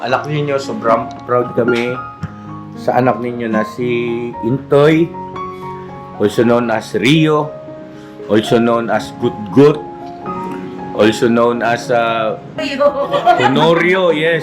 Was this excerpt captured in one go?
no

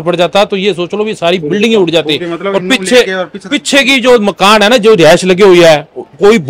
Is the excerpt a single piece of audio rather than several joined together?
yes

